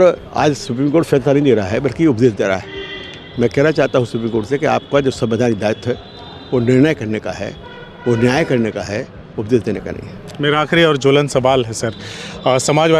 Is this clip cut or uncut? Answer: uncut